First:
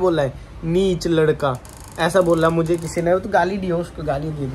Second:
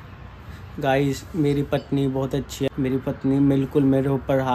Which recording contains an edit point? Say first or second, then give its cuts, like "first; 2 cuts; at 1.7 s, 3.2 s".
second; 1 cut; at 2.7 s